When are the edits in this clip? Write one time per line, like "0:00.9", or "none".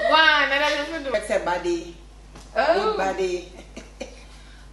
0:01.1